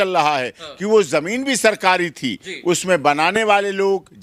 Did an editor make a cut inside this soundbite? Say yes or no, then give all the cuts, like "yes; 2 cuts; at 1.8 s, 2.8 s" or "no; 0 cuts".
no; 0 cuts